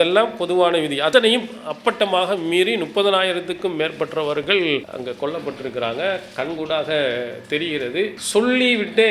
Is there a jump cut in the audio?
yes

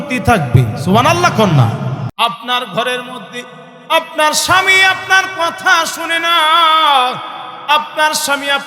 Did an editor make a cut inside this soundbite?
yes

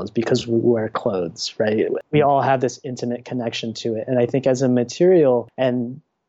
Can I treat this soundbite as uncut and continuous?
no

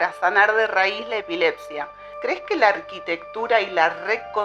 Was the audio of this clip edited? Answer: yes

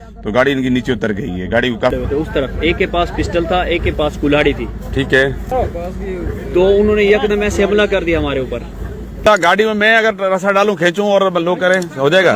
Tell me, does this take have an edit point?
yes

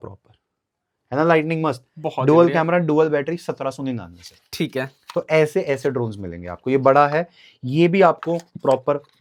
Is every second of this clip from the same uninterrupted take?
yes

